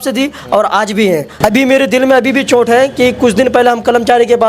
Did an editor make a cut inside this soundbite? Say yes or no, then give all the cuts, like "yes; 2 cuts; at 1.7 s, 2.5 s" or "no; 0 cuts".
yes; 1 cut; at 1.3 s